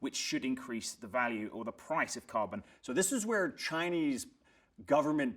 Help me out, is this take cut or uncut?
cut